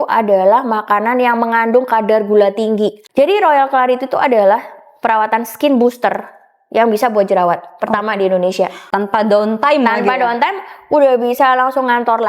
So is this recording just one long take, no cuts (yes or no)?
no